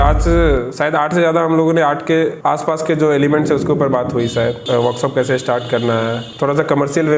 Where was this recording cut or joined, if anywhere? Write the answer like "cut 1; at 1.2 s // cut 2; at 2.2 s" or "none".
cut 1; at 2.4 s // cut 2; at 4.6 s // cut 3; at 6.3 s